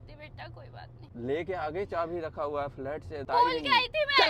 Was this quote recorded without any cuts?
no; 2 cuts; at 1.0 s, 3.3 s

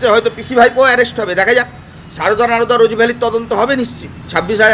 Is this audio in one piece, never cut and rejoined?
yes; 0 cuts

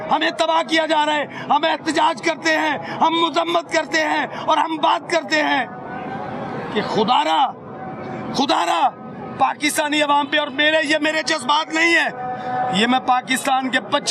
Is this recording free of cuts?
yes; 0 cuts

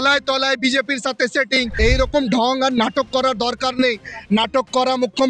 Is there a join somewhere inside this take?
yes; 1 cut; at 1.7 s

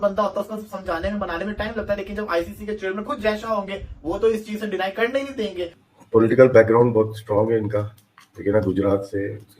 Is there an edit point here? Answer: yes; 1 cut; at 5.8 s

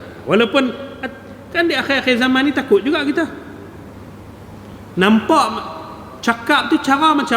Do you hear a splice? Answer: no; 0 cuts

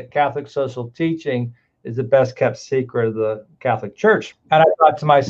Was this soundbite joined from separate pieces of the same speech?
yes; 1 cut; at 4.3 s

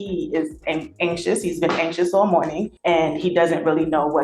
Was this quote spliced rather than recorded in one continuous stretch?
yes; 1 cut; at 2.7 s

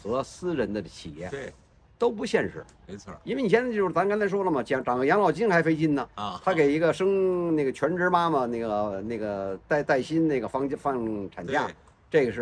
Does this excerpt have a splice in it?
no; 0 cuts

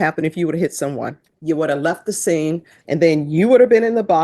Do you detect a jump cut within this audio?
yes; 2 cuts; at 1.3 s, 2.7 s

